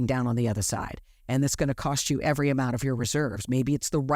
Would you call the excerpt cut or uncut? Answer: uncut